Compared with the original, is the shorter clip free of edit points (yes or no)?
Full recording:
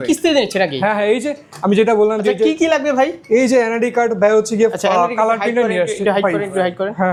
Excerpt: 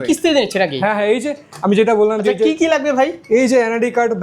yes